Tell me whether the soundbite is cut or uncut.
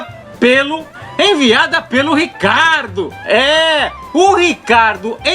cut